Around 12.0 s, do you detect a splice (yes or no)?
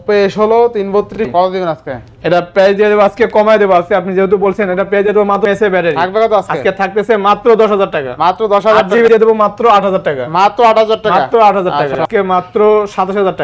yes